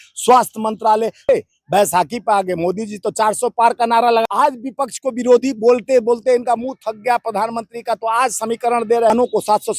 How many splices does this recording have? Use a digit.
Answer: 3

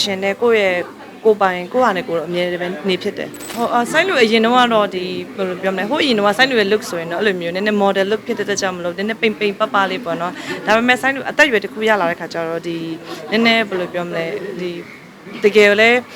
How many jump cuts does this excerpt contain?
1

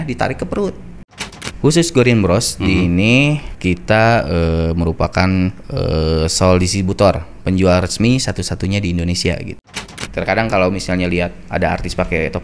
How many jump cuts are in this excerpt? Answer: 4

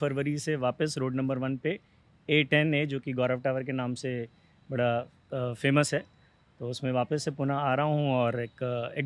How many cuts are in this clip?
0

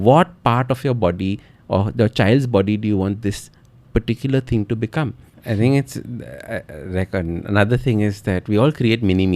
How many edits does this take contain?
1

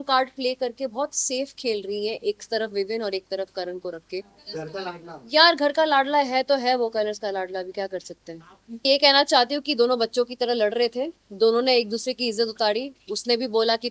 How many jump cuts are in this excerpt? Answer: 2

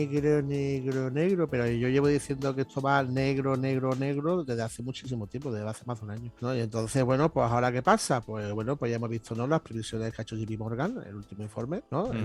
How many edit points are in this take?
0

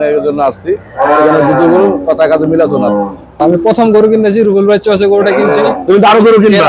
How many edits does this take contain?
1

